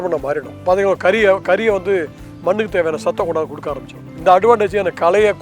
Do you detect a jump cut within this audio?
no; 0 cuts

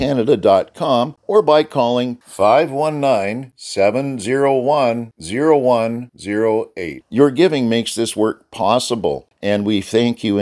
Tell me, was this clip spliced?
yes; 2 cuts; at 1.2 s, 9.3 s

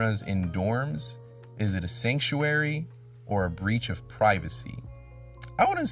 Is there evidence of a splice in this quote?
no; 0 cuts

